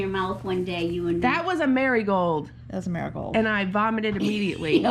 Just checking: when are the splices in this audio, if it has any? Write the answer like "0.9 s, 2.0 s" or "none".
none